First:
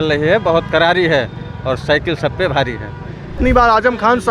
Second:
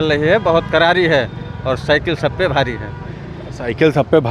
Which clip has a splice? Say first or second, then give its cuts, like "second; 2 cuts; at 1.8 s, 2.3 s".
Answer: first; 1 cut; at 3.3 s